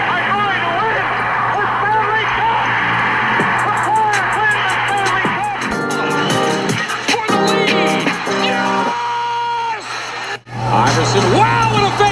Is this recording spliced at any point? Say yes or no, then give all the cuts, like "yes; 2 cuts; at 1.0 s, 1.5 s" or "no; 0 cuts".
yes; 1 cut; at 5.4 s